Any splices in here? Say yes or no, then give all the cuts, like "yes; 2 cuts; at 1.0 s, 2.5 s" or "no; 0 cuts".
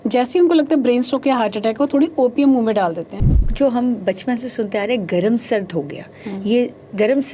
yes; 1 cut; at 3.5 s